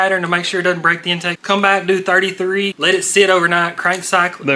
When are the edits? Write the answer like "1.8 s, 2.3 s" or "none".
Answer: 1.3 s, 2.8 s